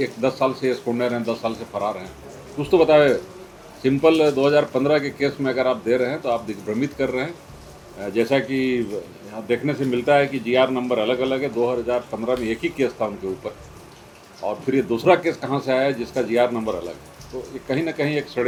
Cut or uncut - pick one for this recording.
uncut